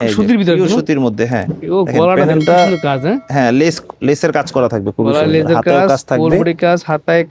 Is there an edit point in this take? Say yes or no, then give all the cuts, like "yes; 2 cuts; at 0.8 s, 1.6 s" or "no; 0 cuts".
no; 0 cuts